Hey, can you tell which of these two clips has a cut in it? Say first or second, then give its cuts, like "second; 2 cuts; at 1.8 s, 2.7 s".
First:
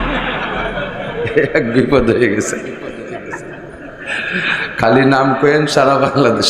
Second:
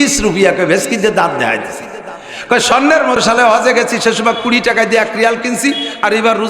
second; 1 cut; at 3.2 s